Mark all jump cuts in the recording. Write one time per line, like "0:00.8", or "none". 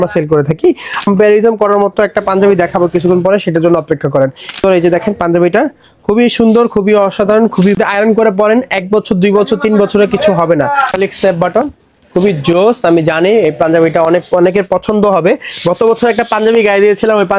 0:01.1
0:04.6
0:07.8
0:10.9

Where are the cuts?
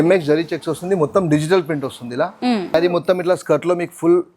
0:02.7

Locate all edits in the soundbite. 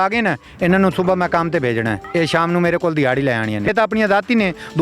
0:02.0
0:03.7

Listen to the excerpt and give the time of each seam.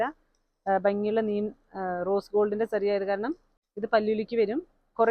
0:03.5

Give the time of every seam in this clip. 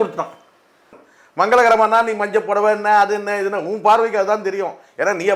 0:01.0

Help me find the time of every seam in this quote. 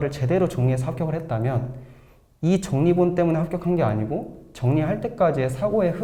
none

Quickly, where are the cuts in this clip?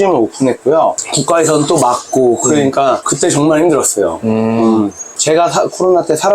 0:05.2

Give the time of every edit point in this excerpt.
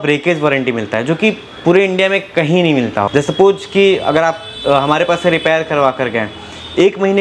0:03.1

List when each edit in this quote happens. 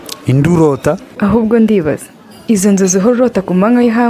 0:01.1

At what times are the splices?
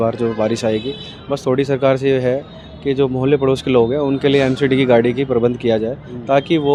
none

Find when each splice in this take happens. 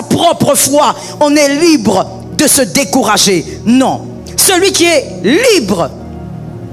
none

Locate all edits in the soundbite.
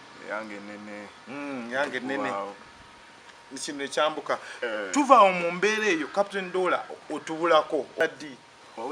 0:08.0

